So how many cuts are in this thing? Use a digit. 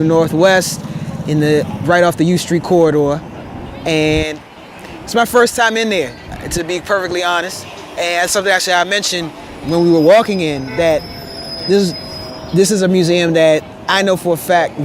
0